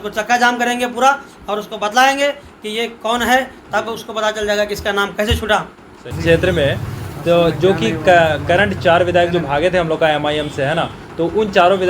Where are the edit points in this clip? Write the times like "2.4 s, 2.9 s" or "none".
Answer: 6.1 s